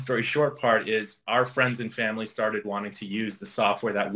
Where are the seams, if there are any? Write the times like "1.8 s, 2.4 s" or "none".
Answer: 1.2 s